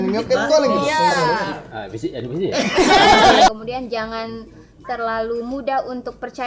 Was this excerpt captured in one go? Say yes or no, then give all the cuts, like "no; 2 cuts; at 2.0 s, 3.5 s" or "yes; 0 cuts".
no; 1 cut; at 3.5 s